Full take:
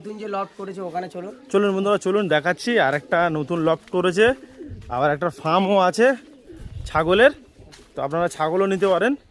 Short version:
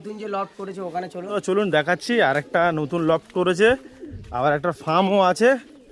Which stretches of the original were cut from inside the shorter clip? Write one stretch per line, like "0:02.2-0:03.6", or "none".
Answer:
0:01.4-0:02.0